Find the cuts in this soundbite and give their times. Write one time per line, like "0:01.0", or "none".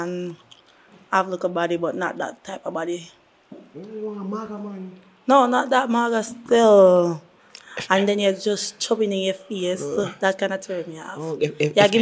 none